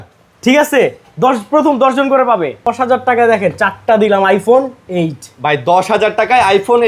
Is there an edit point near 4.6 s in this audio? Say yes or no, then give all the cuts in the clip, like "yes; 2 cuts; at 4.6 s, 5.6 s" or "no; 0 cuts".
no; 1 cut; at 2.6 s